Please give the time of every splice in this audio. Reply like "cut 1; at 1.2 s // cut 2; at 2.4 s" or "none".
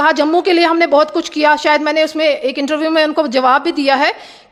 none